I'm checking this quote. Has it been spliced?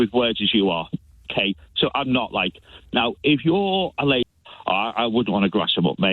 yes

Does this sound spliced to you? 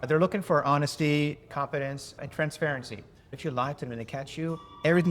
yes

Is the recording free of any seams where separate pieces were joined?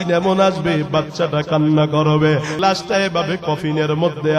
no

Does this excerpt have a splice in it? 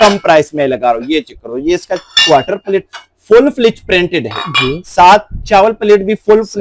no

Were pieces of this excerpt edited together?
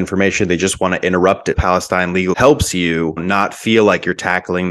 yes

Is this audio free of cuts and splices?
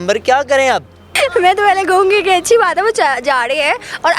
no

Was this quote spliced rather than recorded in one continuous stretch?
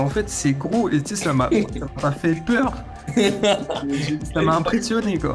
no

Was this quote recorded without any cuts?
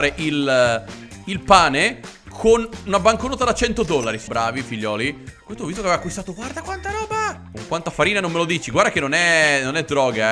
no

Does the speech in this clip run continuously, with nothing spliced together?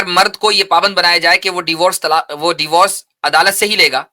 yes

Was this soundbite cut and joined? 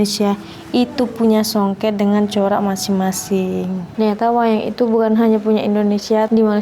yes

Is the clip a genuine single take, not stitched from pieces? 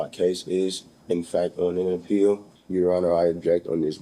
no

